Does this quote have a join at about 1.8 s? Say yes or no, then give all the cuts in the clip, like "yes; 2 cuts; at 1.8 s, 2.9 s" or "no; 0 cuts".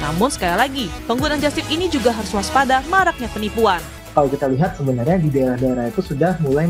no; 1 cut; at 4.0 s